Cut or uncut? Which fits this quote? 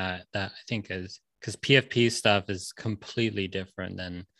cut